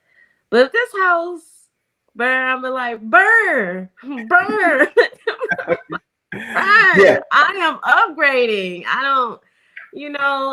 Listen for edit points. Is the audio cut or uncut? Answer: uncut